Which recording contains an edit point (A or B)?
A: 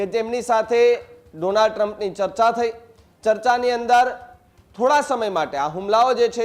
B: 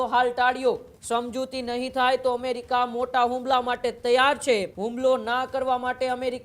B